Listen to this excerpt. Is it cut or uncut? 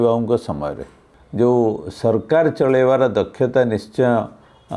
cut